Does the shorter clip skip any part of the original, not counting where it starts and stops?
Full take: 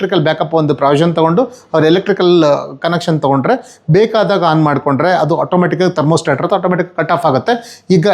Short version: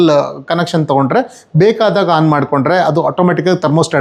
no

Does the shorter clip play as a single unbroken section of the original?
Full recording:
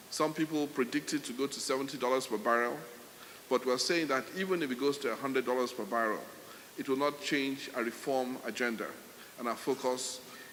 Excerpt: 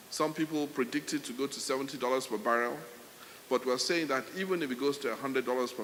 yes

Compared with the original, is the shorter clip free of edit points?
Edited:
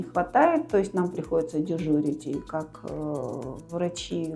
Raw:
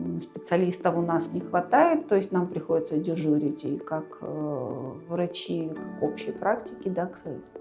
yes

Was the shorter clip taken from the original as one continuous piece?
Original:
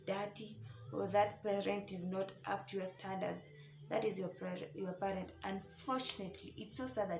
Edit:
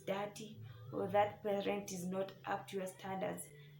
yes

